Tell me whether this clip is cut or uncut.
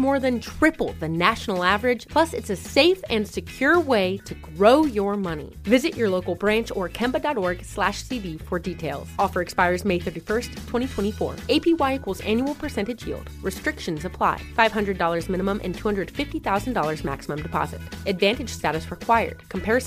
uncut